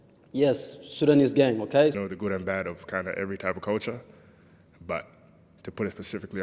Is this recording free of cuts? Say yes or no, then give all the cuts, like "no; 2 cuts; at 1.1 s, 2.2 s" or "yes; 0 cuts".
no; 1 cut; at 2.0 s